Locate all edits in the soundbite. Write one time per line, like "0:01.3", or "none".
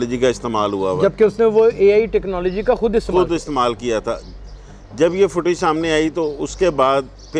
none